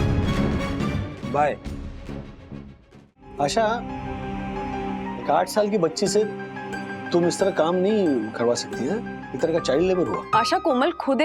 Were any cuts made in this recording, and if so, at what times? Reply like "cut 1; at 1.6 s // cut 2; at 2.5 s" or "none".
cut 1; at 3.3 s // cut 2; at 10.2 s